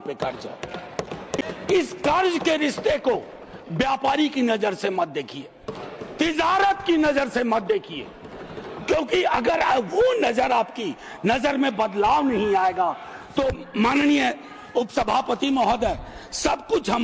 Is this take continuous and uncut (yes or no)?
yes